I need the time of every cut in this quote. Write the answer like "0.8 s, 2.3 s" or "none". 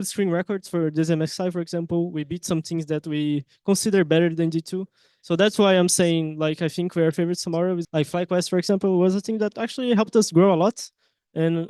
7.8 s